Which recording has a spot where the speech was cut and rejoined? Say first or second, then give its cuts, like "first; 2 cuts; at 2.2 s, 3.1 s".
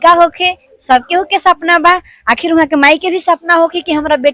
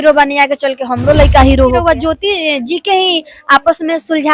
second; 1 cut; at 1.8 s